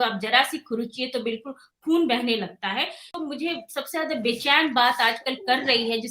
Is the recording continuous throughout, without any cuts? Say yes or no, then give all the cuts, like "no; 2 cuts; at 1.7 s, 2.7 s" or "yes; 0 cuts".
no; 1 cut; at 3.2 s